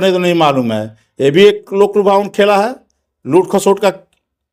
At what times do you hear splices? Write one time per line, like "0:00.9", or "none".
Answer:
none